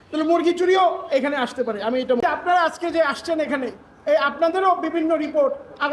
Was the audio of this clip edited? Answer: yes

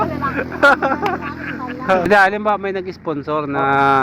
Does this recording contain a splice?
yes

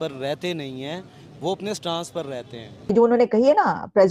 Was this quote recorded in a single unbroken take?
no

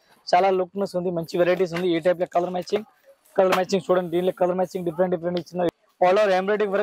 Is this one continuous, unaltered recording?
no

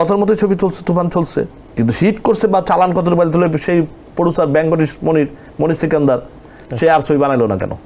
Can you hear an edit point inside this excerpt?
no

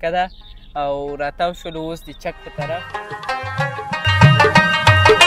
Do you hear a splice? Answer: yes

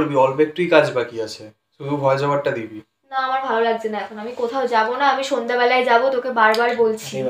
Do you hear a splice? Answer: no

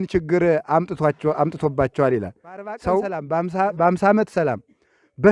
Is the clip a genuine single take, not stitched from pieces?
no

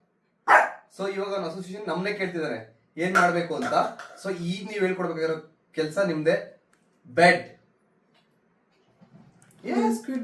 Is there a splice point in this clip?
no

